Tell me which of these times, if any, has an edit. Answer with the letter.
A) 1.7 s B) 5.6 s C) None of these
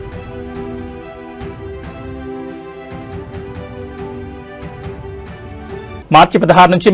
B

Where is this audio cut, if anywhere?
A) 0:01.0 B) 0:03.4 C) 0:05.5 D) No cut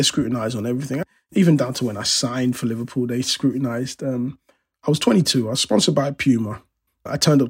A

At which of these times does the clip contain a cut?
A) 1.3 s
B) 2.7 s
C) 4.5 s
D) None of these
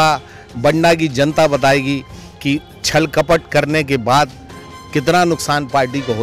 D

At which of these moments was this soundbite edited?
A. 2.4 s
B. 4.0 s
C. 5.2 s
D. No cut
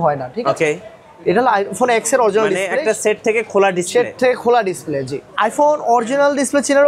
C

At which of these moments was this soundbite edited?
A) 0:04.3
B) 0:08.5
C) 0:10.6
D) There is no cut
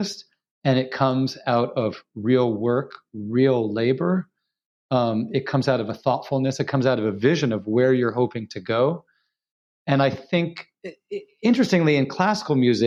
D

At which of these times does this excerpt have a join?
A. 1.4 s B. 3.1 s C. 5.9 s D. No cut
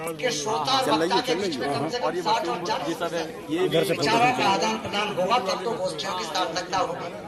D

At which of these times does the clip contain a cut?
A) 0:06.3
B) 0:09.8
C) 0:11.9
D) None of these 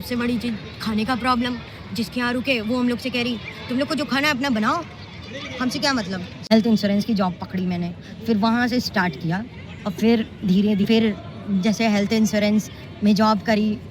A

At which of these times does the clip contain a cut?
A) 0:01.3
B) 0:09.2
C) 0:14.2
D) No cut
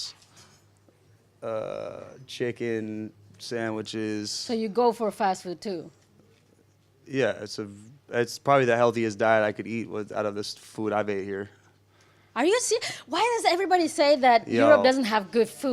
C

